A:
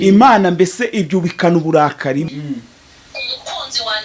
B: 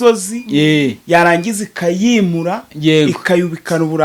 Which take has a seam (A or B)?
A